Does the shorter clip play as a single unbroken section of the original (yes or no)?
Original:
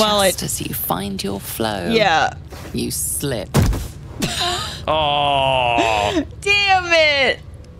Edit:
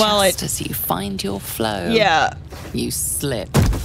yes